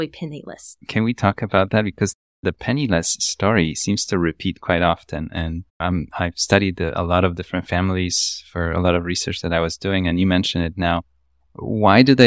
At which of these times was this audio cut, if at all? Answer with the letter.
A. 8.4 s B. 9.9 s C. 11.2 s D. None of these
D